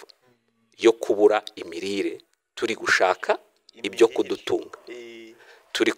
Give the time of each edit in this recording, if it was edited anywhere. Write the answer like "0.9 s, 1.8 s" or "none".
none